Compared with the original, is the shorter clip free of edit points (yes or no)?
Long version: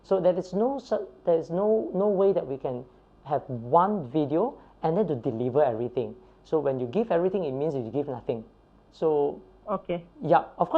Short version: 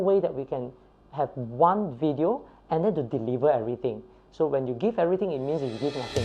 yes